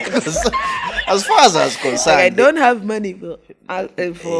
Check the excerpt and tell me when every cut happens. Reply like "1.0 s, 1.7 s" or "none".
none